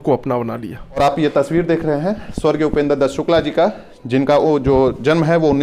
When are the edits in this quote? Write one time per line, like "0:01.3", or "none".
0:01.0